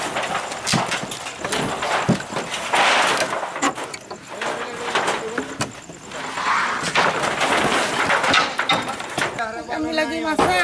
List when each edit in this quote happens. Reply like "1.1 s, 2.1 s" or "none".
9.3 s